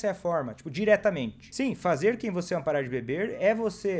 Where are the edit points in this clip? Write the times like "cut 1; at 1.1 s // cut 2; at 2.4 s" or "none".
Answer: cut 1; at 1.4 s